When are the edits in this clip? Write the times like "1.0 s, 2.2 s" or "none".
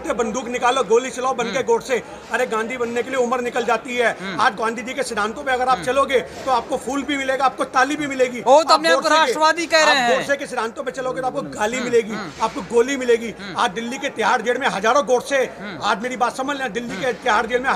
none